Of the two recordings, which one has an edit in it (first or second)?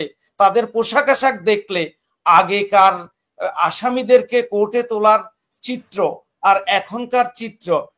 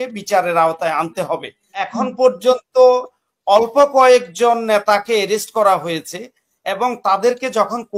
second